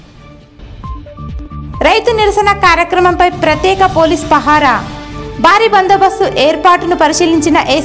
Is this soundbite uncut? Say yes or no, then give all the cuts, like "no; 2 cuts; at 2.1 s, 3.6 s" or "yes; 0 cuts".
no; 1 cut; at 1.2 s